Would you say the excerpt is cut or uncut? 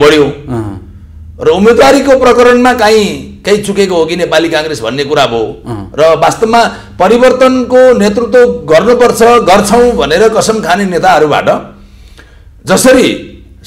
uncut